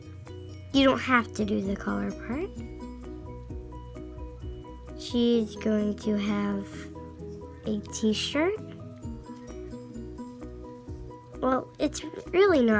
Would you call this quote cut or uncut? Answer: cut